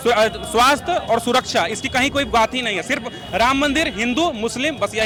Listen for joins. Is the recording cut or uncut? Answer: uncut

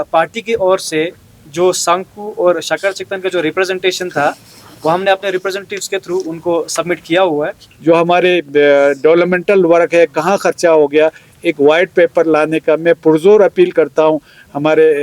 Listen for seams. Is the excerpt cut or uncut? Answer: cut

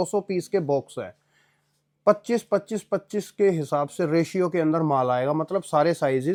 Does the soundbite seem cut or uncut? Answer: uncut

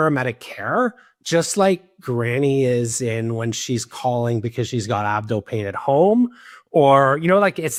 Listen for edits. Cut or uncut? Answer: uncut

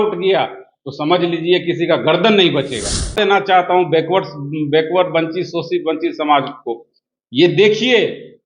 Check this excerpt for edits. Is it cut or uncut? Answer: cut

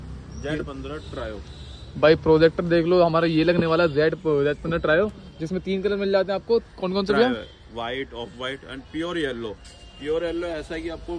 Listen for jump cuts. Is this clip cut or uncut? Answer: uncut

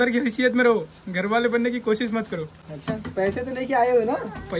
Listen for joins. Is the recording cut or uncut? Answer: uncut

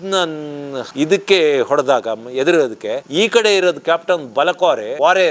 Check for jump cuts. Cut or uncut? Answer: uncut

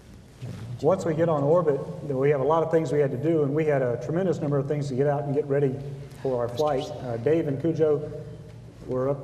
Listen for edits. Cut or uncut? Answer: uncut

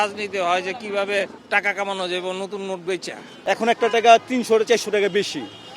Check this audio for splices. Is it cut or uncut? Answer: cut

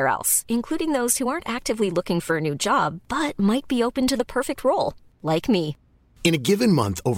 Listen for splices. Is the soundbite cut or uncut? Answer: uncut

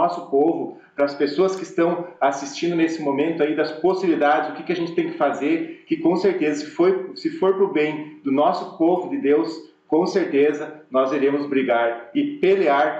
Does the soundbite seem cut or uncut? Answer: uncut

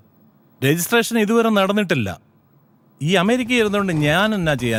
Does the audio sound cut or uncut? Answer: uncut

